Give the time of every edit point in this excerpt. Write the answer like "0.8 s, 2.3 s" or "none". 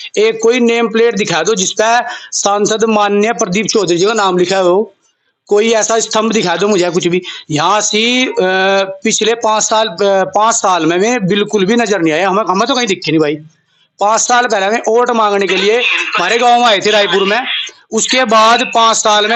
none